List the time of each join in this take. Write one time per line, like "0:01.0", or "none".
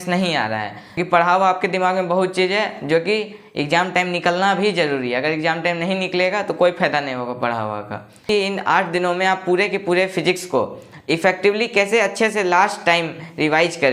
0:01.0
0:08.2